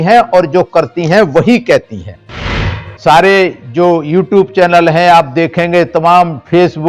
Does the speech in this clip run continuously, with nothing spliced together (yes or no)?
no